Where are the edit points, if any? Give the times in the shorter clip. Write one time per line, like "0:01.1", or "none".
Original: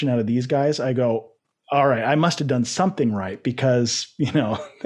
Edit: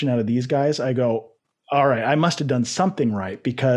none